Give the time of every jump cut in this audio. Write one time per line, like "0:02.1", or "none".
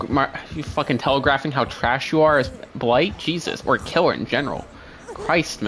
none